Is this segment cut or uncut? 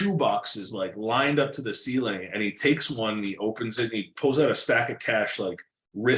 uncut